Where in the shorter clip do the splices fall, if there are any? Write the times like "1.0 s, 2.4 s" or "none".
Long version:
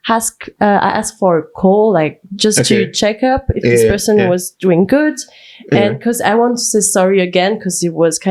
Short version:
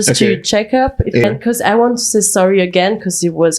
1.2 s